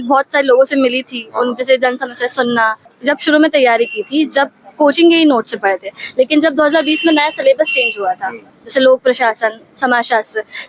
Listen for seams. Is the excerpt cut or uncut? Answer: cut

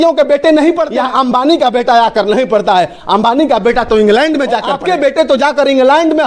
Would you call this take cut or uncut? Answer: cut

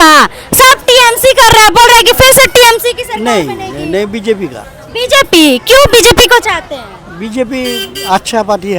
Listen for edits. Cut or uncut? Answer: uncut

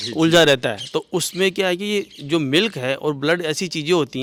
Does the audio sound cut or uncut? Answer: uncut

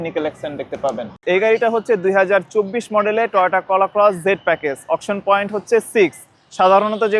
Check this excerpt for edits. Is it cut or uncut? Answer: cut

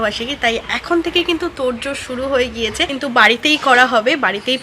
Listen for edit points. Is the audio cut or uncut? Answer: cut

